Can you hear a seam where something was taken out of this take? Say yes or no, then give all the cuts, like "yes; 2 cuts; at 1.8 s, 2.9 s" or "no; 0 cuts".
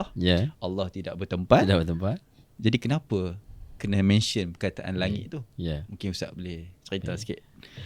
no; 0 cuts